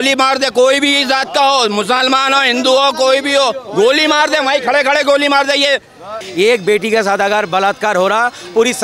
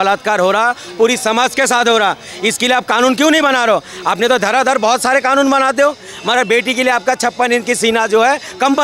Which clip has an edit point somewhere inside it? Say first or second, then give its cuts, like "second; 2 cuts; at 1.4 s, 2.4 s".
first; 1 cut; at 6.2 s